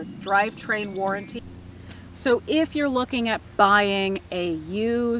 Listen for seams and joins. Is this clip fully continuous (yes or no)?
no